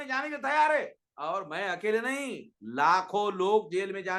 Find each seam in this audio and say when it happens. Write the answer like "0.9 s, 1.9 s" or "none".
none